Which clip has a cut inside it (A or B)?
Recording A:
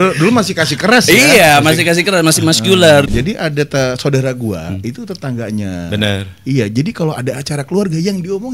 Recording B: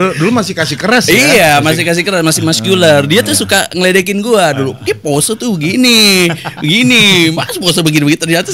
A